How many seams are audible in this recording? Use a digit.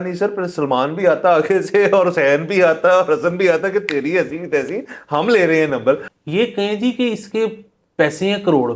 1